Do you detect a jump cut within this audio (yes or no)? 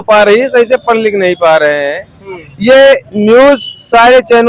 no